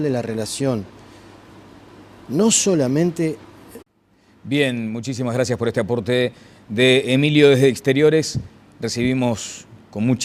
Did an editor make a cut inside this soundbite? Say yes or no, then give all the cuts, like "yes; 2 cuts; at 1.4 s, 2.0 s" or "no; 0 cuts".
no; 0 cuts